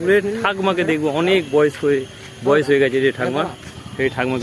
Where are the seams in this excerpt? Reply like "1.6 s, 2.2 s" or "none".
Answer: none